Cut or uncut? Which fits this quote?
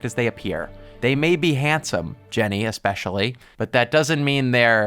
uncut